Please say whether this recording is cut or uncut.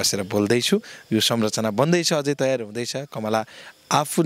uncut